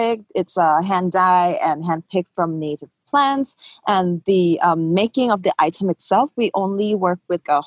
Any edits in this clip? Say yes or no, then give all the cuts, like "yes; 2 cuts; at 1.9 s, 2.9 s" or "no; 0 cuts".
no; 0 cuts